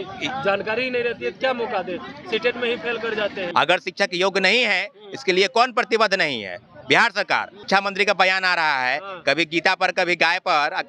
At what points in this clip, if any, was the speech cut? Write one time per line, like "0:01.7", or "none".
0:03.4
0:07.6